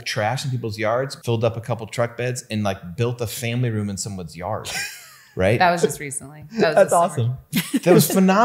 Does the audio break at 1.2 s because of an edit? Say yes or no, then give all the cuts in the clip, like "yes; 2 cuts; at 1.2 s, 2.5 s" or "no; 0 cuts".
yes; 1 cut; at 1.2 s